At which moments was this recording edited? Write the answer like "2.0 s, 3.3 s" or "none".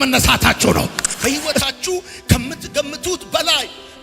1.0 s